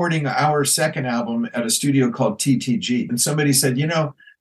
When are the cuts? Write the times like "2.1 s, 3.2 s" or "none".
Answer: 3.1 s